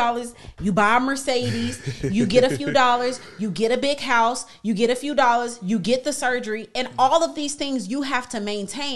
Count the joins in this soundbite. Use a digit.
0